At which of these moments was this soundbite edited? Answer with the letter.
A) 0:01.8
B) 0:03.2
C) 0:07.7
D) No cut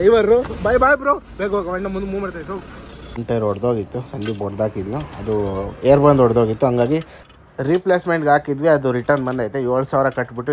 B